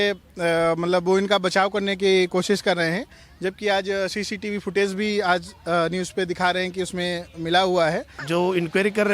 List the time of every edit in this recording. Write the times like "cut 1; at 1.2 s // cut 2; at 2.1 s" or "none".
cut 1; at 8.2 s